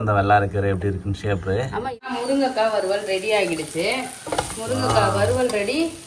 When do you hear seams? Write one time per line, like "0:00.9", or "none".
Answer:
0:02.1